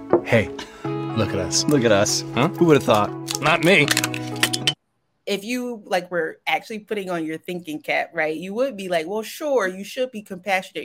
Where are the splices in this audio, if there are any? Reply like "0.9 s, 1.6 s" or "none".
4.6 s